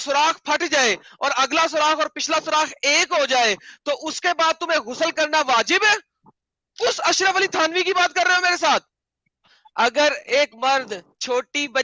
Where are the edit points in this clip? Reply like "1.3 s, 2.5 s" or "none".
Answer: 9.4 s